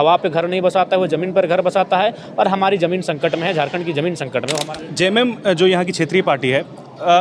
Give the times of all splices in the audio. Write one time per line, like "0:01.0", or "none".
0:04.6